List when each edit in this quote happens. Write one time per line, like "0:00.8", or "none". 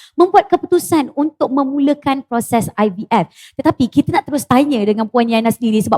none